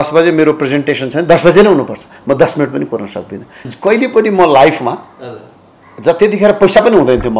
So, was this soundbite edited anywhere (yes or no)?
yes